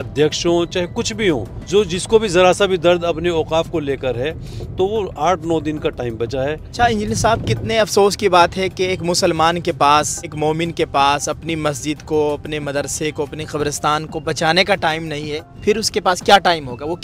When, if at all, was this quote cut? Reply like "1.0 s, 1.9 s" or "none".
1.5 s, 6.6 s, 10.3 s, 15.5 s